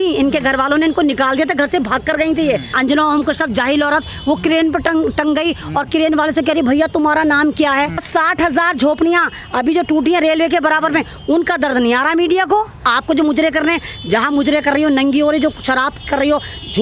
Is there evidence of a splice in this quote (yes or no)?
yes